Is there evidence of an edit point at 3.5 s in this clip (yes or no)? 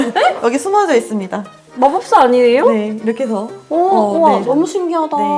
no